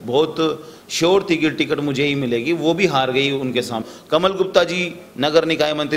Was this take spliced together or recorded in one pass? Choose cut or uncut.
cut